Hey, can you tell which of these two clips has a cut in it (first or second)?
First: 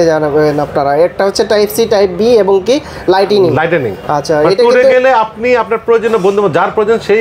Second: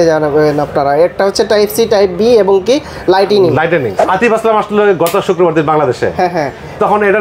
second